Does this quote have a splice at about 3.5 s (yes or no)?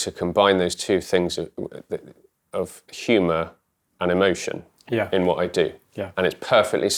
no